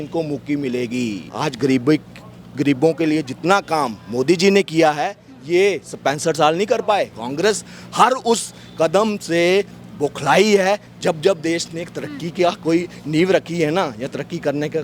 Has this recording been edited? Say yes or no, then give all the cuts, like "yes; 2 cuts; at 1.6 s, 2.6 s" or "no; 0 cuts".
yes; 2 cuts; at 1.2 s, 7.2 s